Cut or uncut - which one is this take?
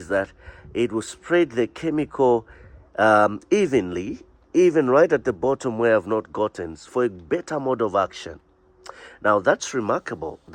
uncut